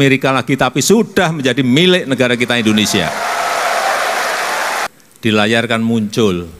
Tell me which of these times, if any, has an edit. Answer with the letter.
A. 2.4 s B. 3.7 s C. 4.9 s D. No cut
C